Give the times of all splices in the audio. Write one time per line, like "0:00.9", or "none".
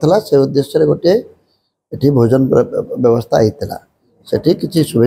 none